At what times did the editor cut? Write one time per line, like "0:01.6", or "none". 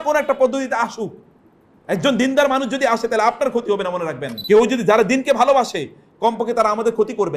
0:04.3